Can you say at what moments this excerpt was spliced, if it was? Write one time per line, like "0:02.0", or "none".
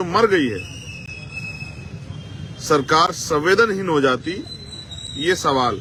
none